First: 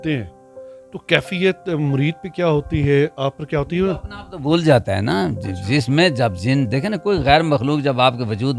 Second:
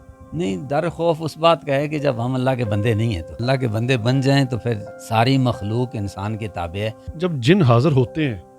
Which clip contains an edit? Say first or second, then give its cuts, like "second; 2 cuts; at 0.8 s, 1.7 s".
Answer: second; 3 cuts; at 3.3 s, 4.9 s, 7.1 s